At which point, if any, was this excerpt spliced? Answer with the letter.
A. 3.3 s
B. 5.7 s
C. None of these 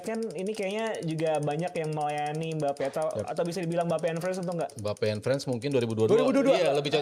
C